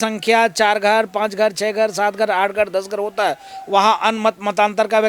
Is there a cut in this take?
no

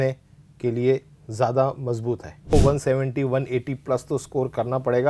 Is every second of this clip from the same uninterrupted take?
no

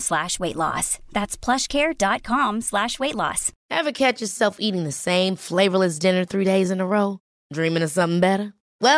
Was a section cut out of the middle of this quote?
no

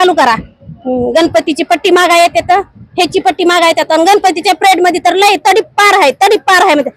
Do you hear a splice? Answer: no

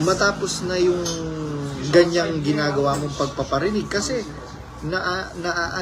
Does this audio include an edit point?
no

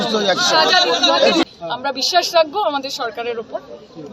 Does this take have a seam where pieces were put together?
yes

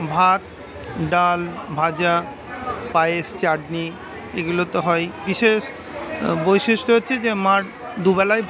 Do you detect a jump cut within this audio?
yes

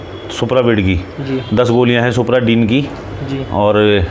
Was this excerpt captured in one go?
yes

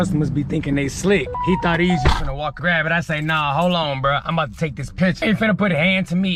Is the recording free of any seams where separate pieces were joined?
no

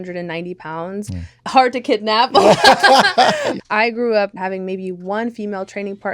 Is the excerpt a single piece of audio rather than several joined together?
no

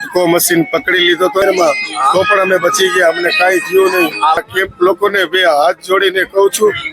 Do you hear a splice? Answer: yes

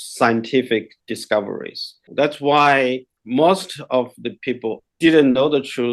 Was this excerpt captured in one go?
no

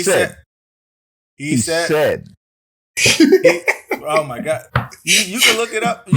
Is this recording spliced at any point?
no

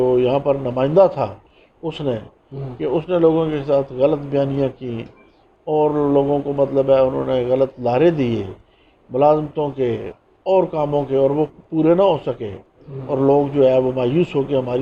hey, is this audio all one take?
yes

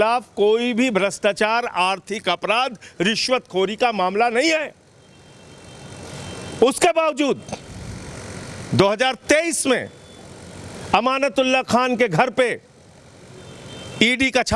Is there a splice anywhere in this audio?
no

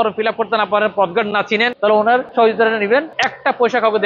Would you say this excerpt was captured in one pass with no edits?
no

